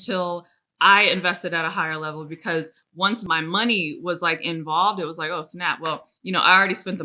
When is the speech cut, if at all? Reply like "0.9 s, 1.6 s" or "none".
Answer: 3.2 s